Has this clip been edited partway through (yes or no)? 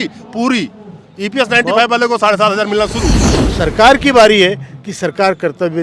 yes